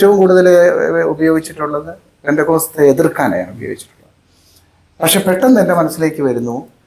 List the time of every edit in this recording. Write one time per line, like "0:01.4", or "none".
none